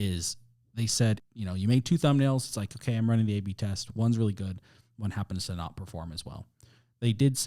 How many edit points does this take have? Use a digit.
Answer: 1